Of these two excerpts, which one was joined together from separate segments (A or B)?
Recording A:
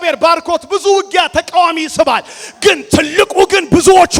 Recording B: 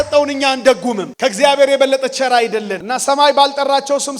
B